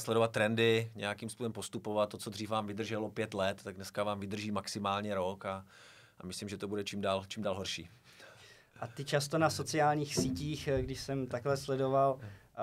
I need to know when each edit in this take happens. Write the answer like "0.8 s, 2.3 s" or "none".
none